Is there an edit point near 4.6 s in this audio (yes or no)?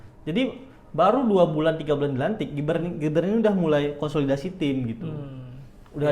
no